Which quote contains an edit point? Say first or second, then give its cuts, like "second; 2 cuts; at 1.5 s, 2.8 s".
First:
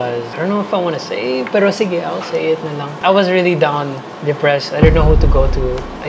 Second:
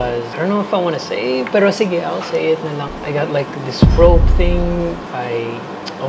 second; 2 cuts; at 2.9 s, 5.0 s